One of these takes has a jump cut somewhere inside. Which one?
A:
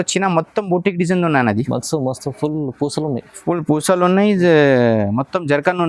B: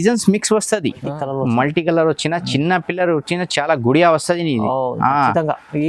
B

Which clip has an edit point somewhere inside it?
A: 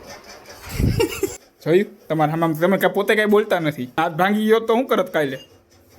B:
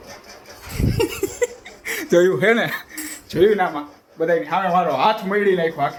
A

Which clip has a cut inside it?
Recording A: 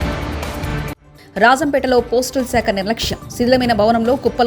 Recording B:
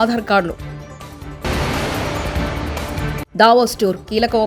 A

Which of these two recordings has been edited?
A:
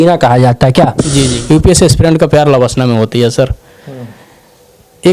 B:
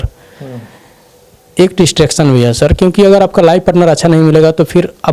A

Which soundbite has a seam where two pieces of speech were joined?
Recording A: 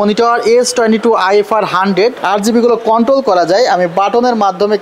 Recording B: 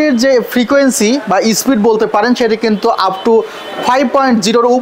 A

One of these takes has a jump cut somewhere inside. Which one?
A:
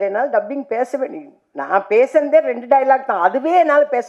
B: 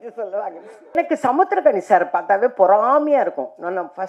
B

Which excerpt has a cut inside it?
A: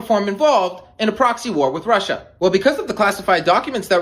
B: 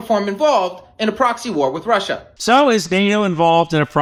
A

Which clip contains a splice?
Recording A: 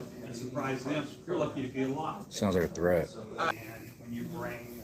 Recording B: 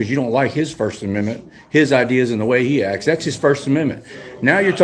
A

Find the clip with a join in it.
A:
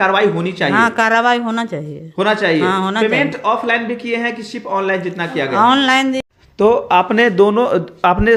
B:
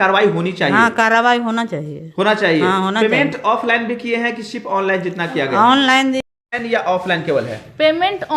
B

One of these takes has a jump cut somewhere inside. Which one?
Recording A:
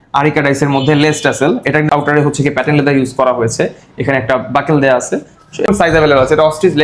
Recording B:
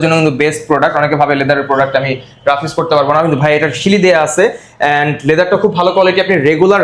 A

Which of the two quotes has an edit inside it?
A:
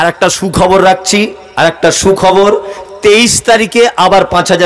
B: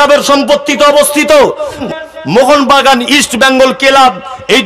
B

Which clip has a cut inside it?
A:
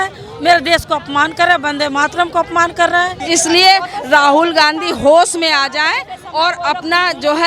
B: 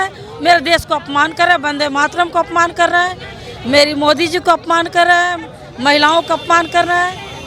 A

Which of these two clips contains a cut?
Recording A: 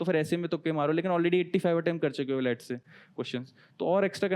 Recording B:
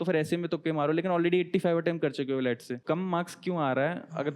B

